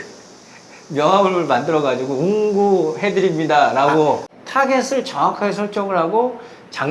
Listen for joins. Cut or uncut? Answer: cut